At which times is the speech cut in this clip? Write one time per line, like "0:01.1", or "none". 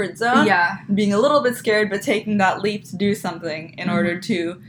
none

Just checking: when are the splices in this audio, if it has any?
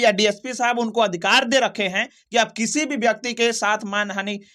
none

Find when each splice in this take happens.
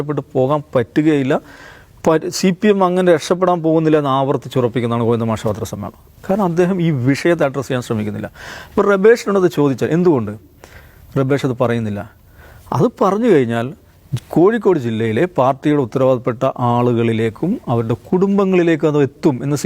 none

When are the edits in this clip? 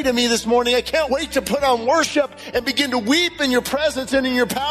0:01.1

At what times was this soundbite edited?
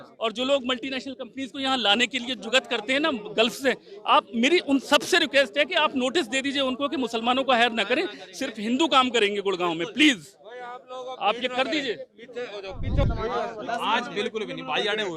0:13.1

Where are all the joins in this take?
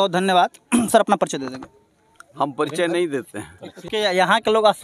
0:03.7

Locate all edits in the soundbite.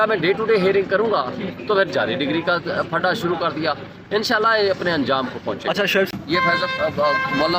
0:06.1

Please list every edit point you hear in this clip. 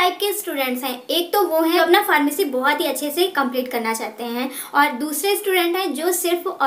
0:01.8

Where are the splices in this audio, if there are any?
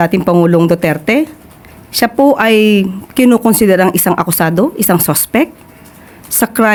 none

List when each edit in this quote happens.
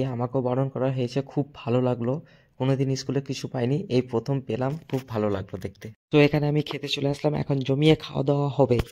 none

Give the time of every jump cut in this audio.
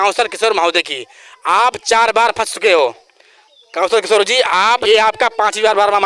0:04.8

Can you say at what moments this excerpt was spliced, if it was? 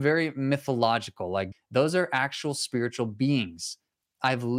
0:01.5

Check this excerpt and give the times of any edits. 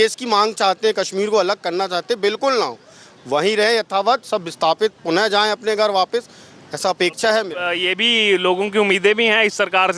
none

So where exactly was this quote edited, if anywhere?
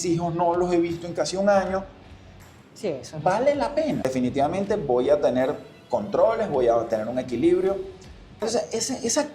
0:04.0
0:08.3

